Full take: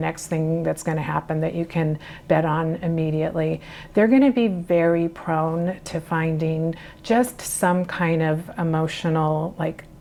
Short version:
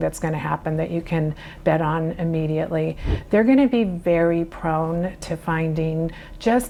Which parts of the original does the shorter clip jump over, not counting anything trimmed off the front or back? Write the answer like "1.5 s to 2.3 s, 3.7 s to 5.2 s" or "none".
none